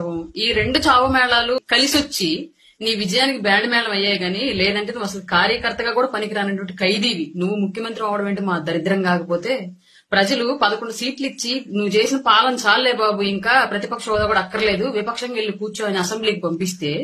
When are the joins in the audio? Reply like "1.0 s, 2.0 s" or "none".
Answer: 1.7 s